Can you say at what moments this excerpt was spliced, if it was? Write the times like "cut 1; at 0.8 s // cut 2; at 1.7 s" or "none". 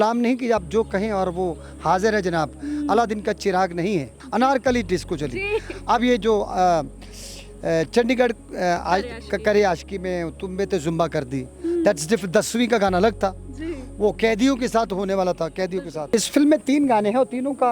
cut 1; at 4.2 s // cut 2; at 16.1 s